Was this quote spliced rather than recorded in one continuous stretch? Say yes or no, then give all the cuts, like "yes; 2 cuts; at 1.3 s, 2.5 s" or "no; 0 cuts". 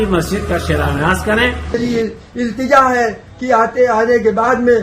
yes; 1 cut; at 1.8 s